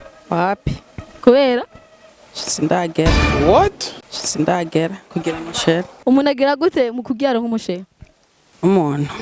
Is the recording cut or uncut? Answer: uncut